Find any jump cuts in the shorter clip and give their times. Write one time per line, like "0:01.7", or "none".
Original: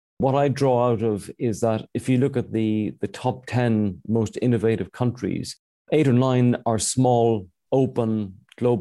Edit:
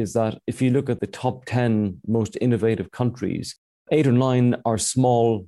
0:01.0